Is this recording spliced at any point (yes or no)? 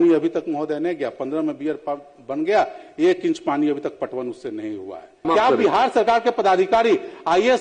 yes